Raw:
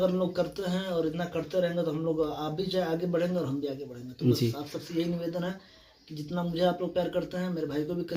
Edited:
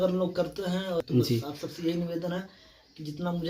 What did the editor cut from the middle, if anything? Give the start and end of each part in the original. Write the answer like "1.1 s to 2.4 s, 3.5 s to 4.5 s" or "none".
1.0 s to 4.1 s